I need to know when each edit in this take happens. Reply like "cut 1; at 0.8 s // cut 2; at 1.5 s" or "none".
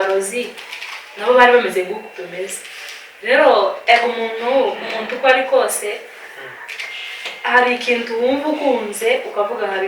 none